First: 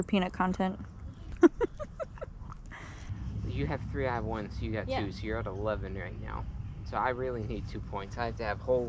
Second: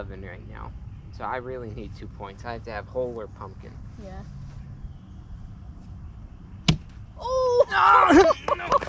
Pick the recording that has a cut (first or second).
first